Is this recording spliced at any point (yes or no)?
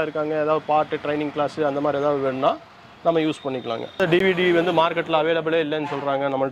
yes